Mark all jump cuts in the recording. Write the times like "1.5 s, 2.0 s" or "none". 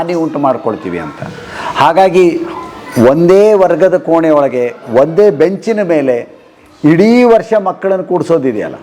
none